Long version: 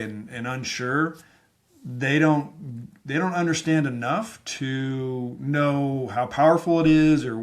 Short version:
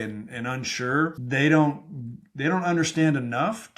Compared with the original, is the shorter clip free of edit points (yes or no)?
no